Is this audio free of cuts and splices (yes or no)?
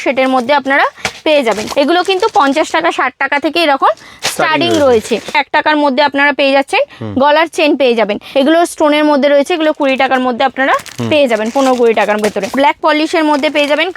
no